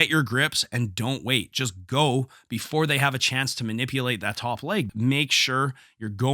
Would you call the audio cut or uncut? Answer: cut